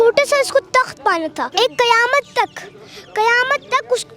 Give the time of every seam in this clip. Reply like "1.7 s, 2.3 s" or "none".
1.4 s